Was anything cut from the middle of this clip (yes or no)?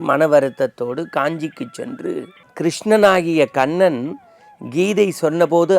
yes